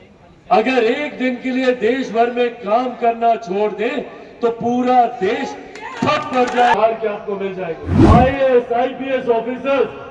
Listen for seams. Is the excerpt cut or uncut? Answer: cut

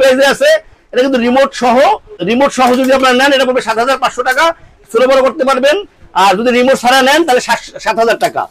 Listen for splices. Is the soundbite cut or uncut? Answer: uncut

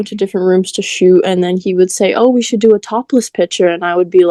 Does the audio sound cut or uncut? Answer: uncut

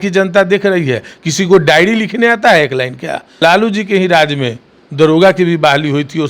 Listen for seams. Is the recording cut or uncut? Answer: cut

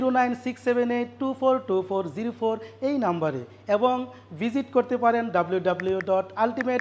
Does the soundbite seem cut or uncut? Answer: uncut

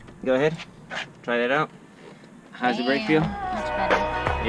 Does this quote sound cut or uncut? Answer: cut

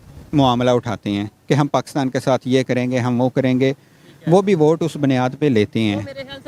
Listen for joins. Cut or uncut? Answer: uncut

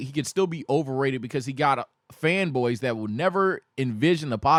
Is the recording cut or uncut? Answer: uncut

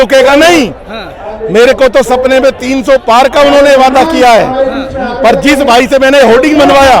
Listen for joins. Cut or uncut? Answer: uncut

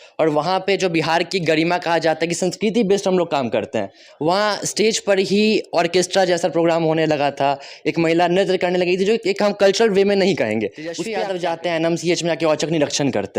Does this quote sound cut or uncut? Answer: cut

